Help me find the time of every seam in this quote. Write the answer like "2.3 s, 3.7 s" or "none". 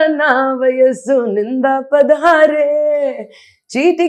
none